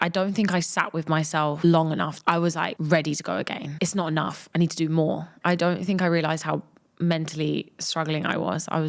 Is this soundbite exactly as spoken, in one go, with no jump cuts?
no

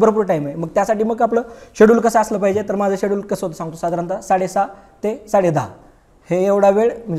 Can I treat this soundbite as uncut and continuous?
yes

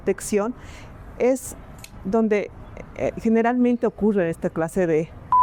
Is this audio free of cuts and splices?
yes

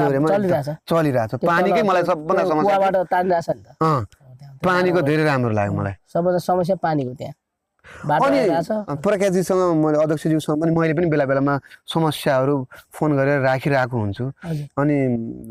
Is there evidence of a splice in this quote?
no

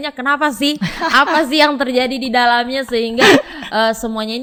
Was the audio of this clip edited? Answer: no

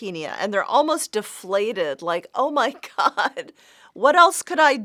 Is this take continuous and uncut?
yes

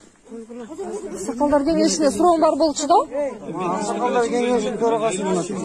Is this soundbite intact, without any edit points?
yes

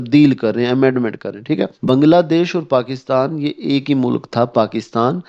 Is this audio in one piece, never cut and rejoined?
no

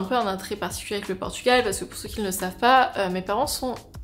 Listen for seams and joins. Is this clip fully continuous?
yes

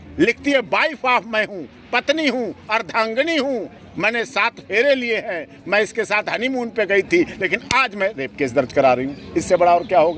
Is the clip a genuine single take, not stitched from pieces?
yes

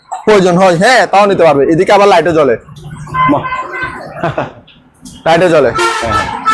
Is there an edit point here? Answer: no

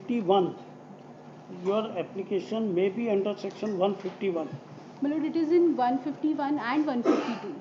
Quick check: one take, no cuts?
yes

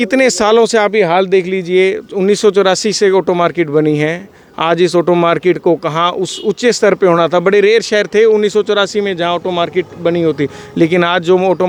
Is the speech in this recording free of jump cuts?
yes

